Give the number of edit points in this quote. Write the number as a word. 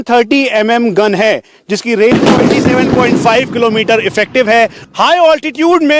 one